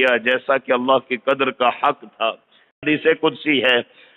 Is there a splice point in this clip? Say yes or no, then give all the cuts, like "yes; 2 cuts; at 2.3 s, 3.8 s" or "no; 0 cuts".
yes; 1 cut; at 2.8 s